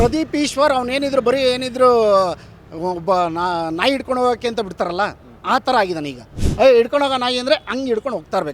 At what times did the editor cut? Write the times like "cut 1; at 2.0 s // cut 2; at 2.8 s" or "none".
cut 1; at 6.4 s

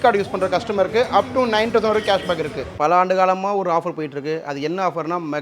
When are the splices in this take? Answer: cut 1; at 2.8 s

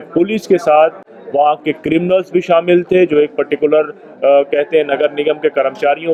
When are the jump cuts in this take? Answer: none

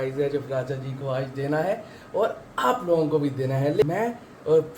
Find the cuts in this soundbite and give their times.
cut 1; at 3.8 s

